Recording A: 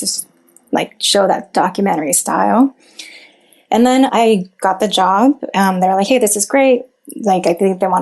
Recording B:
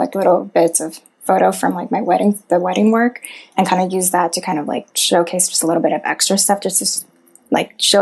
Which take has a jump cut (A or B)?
A